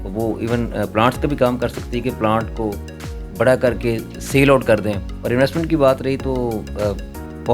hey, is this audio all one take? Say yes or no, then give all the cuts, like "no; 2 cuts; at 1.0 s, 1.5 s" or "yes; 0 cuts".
no; 1 cut; at 5.1 s